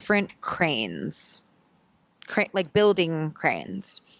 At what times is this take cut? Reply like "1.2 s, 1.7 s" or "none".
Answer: none